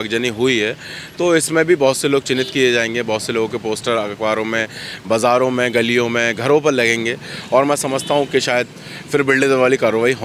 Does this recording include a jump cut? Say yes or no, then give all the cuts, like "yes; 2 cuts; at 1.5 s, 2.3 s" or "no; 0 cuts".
no; 0 cuts